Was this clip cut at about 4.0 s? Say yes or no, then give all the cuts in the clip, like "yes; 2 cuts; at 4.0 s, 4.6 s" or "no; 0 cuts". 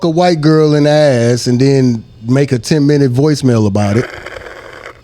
yes; 1 cut; at 4.0 s